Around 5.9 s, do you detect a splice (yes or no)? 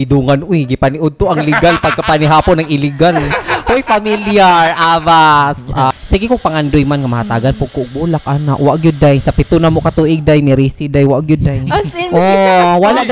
yes